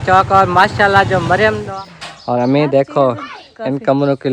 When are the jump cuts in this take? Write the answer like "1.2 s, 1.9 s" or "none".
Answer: 1.6 s